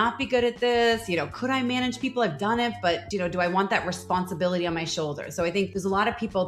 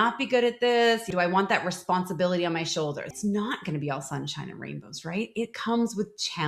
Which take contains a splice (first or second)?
second